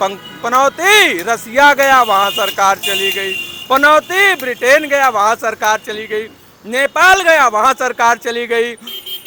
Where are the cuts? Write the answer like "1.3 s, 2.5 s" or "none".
none